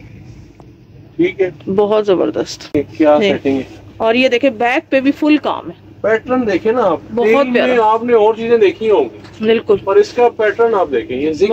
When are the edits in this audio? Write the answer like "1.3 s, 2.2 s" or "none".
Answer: 2.7 s